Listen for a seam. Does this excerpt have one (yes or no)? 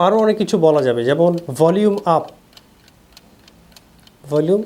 yes